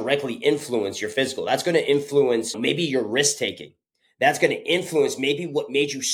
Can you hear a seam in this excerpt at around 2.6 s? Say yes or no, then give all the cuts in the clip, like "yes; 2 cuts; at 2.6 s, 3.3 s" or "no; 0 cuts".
yes; 1 cut; at 2.6 s